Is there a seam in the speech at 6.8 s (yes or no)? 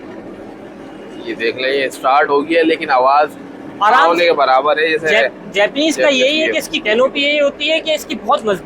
yes